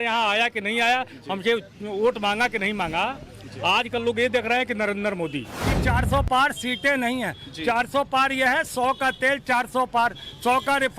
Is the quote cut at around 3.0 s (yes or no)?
no